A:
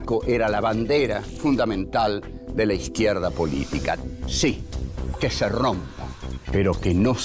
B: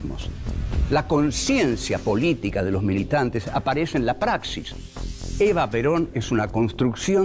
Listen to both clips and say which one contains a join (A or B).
B